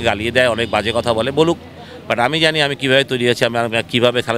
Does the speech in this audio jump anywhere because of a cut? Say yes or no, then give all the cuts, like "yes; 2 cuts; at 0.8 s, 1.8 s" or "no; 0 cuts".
no; 0 cuts